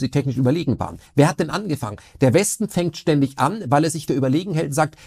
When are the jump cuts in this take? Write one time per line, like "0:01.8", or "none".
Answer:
0:01.1